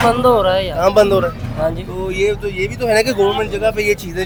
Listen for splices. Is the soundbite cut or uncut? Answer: uncut